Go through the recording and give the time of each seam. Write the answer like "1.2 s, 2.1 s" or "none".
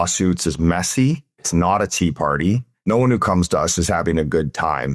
1.4 s, 2.8 s